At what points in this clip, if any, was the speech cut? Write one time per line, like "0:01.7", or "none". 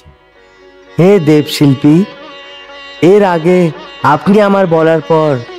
none